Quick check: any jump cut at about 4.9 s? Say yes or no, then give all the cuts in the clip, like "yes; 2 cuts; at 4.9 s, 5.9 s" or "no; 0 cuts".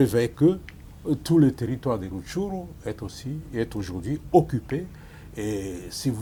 no; 0 cuts